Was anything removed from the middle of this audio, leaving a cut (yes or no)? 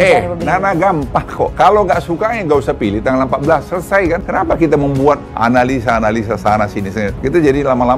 yes